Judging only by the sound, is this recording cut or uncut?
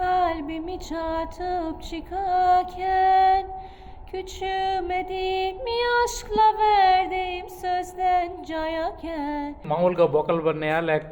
cut